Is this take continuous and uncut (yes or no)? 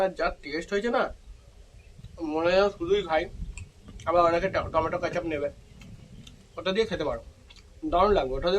yes